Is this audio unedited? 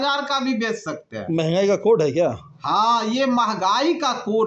yes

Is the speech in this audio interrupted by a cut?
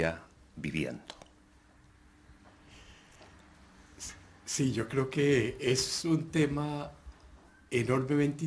yes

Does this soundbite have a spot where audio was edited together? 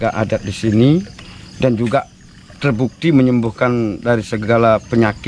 no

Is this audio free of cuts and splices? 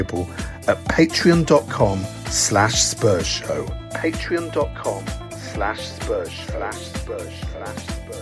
yes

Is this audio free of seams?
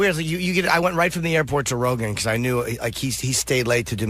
no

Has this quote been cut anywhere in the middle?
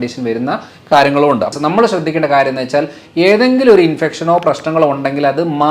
yes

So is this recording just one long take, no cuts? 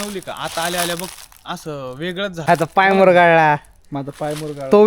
no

